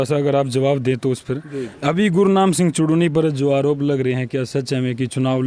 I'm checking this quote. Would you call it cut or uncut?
uncut